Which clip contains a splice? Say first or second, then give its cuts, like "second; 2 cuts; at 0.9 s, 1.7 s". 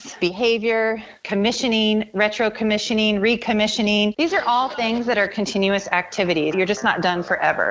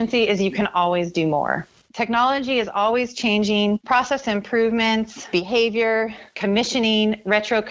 first; 1 cut; at 6.5 s